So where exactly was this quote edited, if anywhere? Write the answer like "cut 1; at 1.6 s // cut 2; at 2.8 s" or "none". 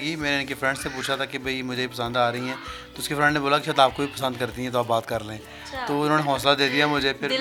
none